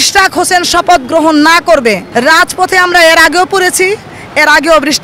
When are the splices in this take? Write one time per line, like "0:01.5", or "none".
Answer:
0:02.0